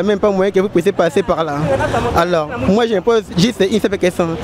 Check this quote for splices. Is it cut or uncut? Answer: uncut